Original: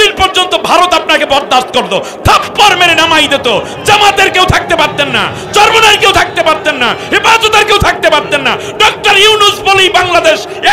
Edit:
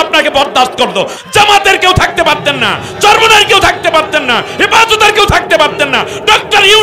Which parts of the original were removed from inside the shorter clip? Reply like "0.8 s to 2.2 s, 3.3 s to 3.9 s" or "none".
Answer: 2.1 s to 3.7 s